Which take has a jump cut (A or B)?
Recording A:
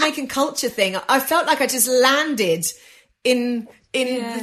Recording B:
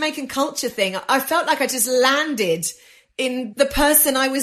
B